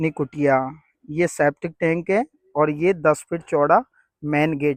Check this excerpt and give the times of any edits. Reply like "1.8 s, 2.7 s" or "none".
none